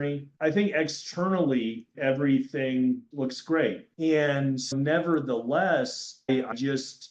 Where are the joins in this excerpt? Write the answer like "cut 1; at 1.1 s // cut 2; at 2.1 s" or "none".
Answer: cut 1; at 3.9 s